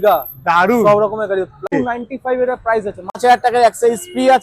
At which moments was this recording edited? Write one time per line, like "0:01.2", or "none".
0:01.7
0:03.2